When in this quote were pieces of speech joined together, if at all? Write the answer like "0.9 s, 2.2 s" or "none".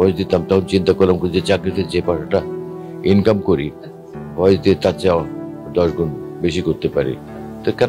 none